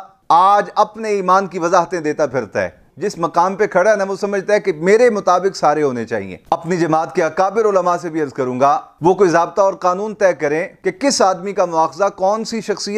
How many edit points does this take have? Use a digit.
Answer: 2